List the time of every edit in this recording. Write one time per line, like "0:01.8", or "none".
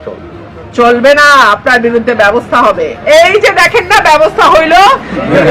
0:02.9